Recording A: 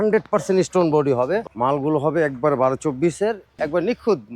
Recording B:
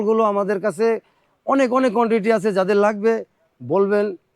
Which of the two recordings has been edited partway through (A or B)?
A